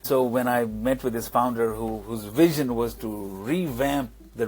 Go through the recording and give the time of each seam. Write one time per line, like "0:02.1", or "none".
none